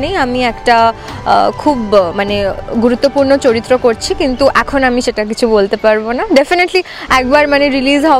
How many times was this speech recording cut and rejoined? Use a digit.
0